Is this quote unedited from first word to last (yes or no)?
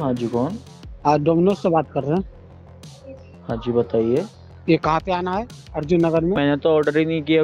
no